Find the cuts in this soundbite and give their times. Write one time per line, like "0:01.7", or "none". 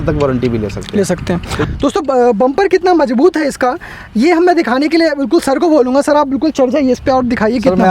0:01.6